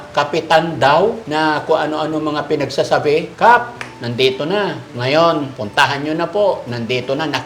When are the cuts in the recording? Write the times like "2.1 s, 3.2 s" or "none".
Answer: 1.2 s, 3.3 s, 4.9 s, 5.6 s